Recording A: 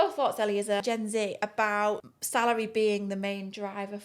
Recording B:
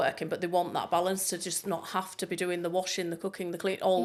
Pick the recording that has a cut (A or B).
A